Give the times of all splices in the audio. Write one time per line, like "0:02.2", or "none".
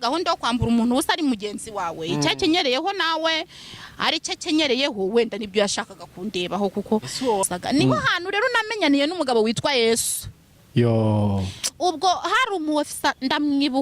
0:07.4